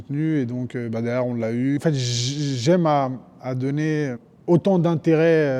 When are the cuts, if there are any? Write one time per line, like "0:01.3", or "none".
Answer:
0:01.8
0:04.3

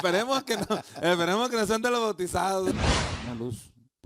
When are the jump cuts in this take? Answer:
0:02.7

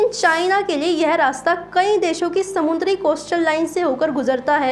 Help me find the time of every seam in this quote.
none

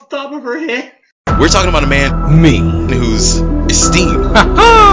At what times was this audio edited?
0:01.0

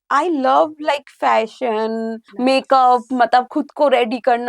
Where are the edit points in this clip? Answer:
0:02.2

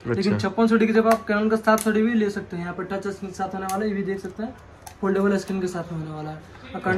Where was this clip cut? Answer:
none

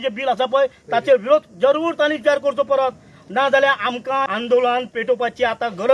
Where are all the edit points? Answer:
0:04.3

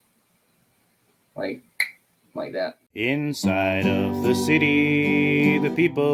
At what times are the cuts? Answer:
0:02.8

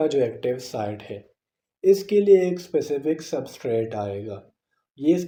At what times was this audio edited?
none

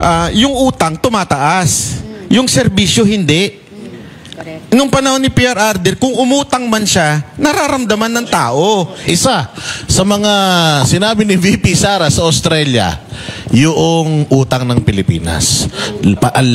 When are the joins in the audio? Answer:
0:08.9

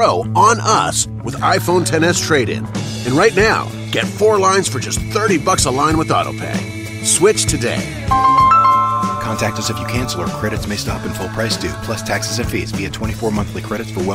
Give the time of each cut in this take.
0:01.0

